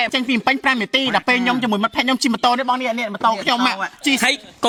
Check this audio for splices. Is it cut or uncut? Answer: uncut